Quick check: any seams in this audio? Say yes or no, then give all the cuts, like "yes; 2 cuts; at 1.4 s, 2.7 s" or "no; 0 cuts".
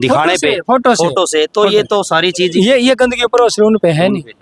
no; 0 cuts